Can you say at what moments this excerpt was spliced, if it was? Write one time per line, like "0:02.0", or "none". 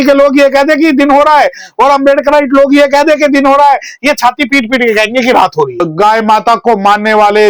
0:05.9